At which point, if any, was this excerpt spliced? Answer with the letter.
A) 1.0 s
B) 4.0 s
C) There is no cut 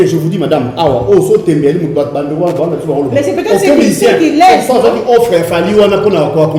C